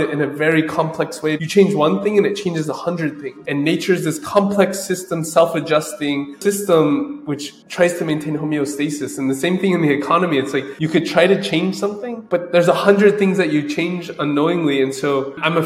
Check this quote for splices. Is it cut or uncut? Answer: cut